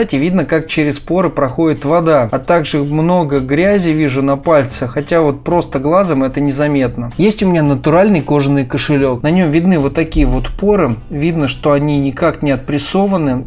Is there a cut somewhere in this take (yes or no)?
no